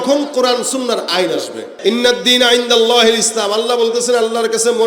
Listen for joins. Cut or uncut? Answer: cut